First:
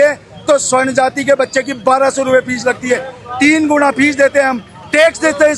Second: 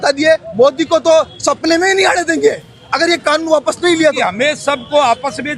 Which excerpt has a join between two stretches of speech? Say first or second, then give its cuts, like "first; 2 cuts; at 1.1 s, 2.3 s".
second; 1 cut; at 4.2 s